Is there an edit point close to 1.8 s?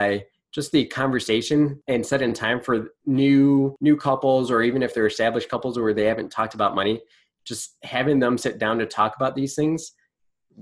yes; 3 cuts; at 1.8 s, 2.9 s, 3.7 s

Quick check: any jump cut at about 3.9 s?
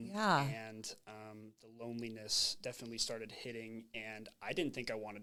no; 0 cuts

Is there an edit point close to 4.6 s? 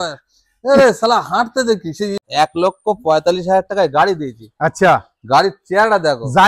no; 1 cut; at 2.2 s

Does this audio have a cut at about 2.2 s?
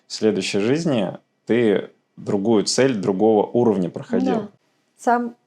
no; 1 cut; at 4.6 s

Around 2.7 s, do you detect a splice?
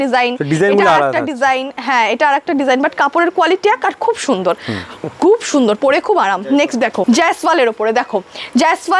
no; 0 cuts

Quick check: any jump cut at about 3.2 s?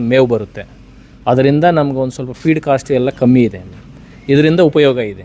no; 0 cuts

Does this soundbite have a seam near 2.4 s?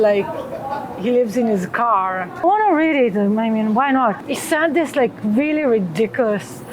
yes; 2 cuts; at 2.4 s, 4.2 s

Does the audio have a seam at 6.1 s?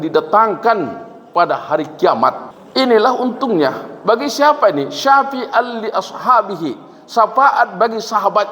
no; 1 cut; at 2.5 s

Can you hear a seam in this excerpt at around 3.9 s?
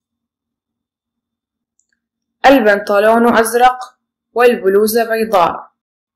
no; 1 cut; at 1.6 s

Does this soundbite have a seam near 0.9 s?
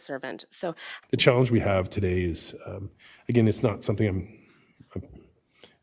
yes; 1 cut; at 0.9 s

